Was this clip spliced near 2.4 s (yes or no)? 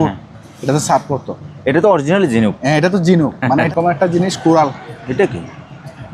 no